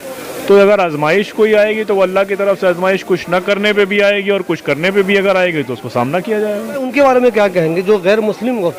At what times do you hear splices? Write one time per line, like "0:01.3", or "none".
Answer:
none